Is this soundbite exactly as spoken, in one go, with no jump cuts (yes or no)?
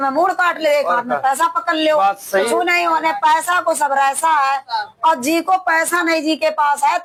yes